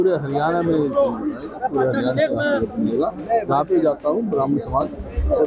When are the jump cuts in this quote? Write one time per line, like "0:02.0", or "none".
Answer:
none